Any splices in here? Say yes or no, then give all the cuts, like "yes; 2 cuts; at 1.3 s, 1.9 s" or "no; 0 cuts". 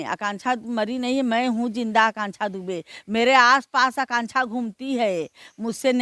no; 0 cuts